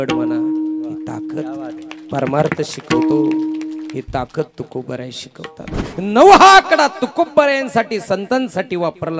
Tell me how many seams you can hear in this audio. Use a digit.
1